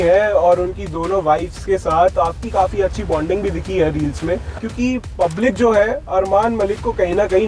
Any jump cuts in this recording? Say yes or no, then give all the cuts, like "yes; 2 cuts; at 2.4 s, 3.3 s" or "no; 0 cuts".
yes; 1 cut; at 4.6 s